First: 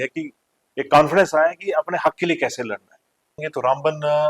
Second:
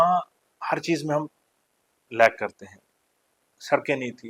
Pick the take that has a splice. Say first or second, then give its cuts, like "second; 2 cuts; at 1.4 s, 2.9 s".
first; 1 cut; at 3.4 s